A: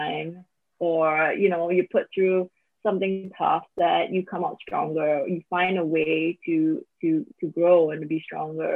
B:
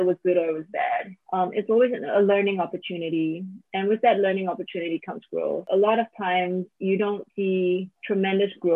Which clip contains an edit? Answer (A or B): B